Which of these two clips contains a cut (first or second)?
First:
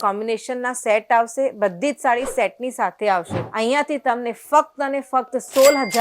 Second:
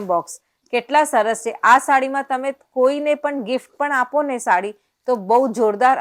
first